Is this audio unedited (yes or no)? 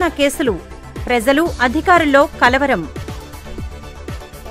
yes